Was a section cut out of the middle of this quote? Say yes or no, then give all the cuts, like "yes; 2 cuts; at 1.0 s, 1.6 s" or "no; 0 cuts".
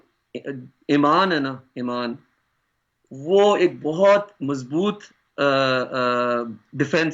no; 0 cuts